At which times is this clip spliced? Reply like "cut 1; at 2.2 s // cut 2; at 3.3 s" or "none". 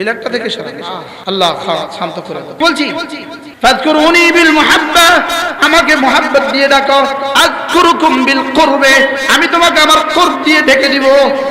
cut 1; at 1.1 s // cut 2; at 2.6 s // cut 3; at 3.4 s